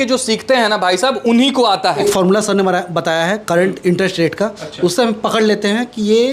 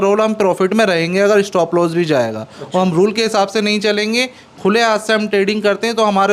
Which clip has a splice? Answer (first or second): first